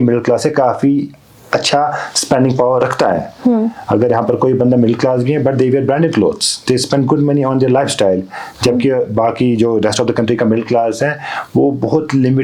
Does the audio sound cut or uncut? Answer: uncut